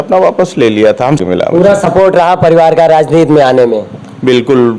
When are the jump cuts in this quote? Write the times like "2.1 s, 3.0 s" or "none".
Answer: 1.2 s